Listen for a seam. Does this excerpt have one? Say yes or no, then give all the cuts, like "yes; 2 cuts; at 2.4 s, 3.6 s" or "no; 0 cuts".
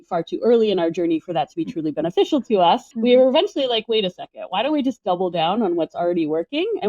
yes; 1 cut; at 2.9 s